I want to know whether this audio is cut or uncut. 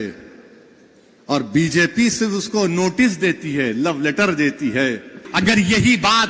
cut